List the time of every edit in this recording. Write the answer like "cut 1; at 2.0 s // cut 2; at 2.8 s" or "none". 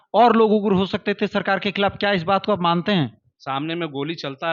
cut 1; at 3.3 s